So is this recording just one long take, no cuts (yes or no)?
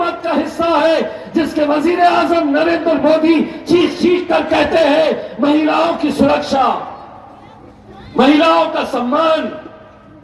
yes